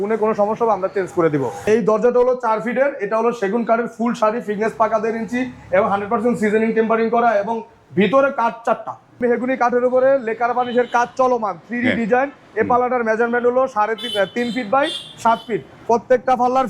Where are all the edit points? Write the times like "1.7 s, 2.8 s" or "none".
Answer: 1.6 s, 9.2 s

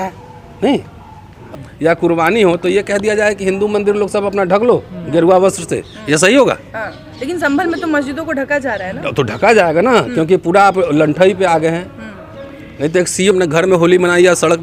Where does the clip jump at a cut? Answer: 1.4 s, 13.3 s

